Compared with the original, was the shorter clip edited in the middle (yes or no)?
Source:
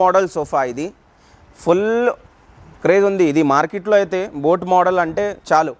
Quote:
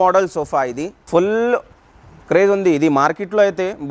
yes